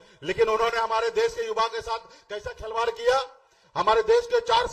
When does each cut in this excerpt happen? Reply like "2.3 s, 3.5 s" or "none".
3.6 s